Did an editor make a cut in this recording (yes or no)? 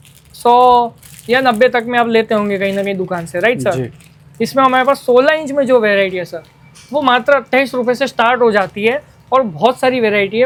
no